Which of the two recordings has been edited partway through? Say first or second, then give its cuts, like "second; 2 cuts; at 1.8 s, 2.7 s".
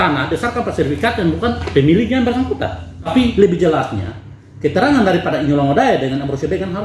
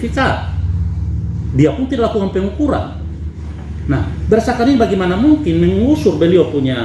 first; 1 cut; at 3.1 s